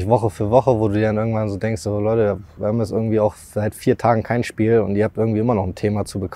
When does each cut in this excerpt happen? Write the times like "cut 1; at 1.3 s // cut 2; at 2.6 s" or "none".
none